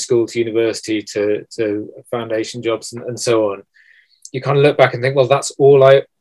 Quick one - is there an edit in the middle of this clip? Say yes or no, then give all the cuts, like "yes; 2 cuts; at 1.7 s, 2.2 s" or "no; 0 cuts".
no; 0 cuts